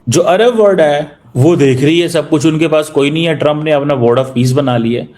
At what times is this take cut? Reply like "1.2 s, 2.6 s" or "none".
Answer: 1.2 s